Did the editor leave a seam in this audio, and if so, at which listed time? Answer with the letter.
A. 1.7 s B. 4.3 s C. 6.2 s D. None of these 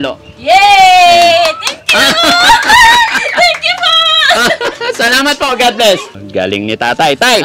C